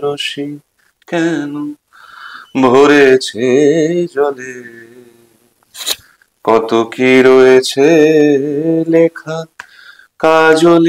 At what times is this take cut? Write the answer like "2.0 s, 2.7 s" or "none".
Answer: none